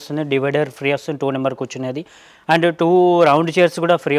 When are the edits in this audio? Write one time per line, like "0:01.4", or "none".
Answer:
none